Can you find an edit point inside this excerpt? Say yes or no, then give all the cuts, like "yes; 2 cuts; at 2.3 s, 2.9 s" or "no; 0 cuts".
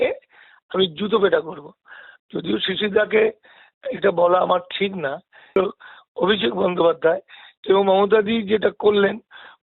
yes; 1 cut; at 5.6 s